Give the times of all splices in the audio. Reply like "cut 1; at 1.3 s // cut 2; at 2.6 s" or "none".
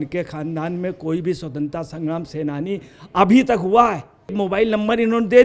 cut 1; at 4.3 s